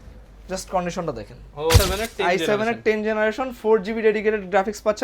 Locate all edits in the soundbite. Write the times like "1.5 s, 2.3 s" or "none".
1.8 s